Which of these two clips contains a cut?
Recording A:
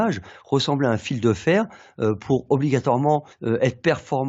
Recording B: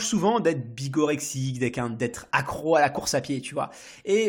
A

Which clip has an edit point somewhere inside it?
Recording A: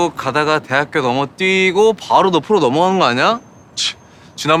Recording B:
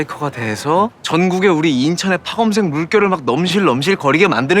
B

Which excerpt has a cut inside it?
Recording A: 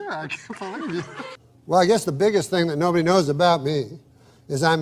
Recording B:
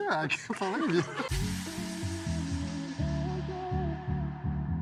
A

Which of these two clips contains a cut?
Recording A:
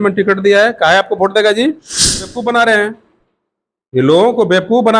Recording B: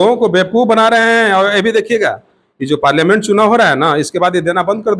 A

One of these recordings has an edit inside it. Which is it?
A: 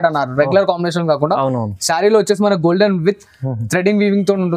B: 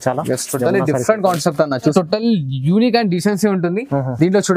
B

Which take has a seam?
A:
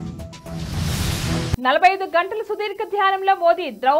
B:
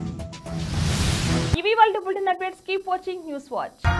A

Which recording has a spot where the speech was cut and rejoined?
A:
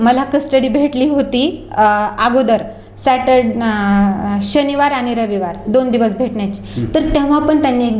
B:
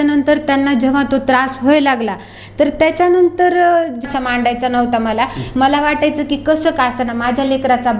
B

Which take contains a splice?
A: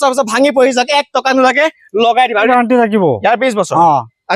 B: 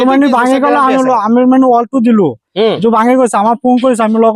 A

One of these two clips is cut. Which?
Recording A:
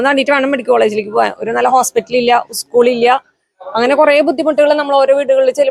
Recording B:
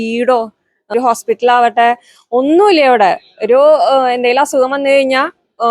B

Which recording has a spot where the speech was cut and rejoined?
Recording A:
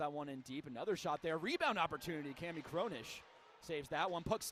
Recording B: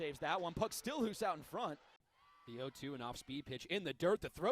B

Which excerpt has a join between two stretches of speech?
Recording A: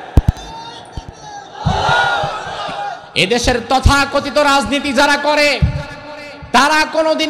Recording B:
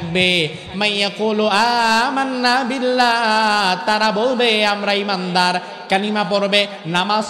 A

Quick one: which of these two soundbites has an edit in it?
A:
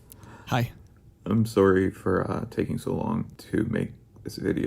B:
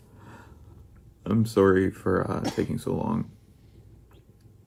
A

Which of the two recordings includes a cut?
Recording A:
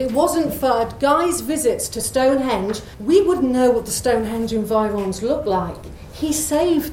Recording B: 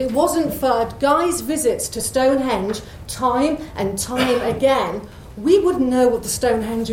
A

